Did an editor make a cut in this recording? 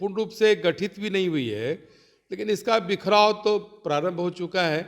no; 0 cuts

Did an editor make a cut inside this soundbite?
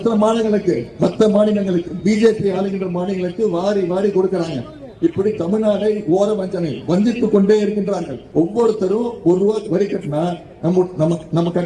yes; 1 cut; at 8.2 s

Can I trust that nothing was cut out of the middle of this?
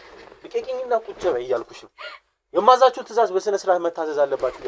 yes; 0 cuts

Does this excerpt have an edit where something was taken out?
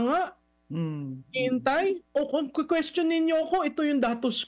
yes; 1 cut; at 2.0 s

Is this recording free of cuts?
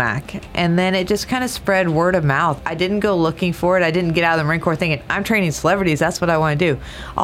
no; 1 cut; at 2.6 s

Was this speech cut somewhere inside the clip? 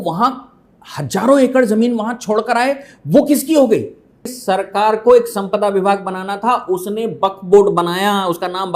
yes; 1 cut; at 4.3 s

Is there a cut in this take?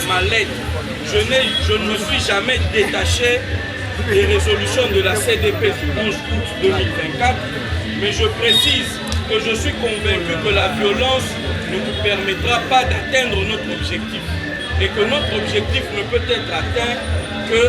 no; 0 cuts

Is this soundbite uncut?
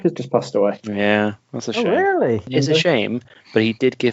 no; 1 cut; at 2.5 s

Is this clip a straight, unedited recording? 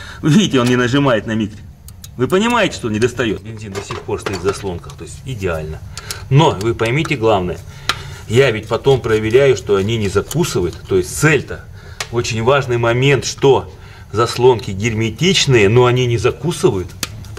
no; 1 cut; at 3.5 s

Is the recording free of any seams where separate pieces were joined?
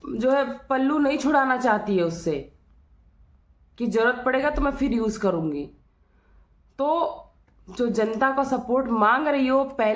yes; 0 cuts

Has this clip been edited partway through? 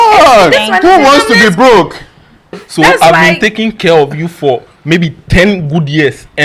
yes; 1 cut; at 2.6 s

